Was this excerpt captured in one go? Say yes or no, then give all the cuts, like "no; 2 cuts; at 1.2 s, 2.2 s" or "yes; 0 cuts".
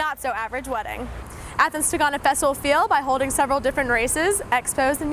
no; 1 cut; at 1.2 s